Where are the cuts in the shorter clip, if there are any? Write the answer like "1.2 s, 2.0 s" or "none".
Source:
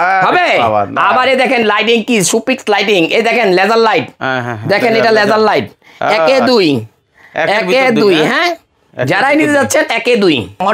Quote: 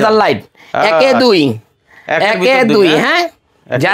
none